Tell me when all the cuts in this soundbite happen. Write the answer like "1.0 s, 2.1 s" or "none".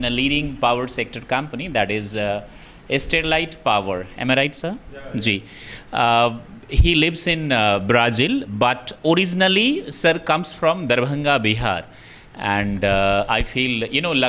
none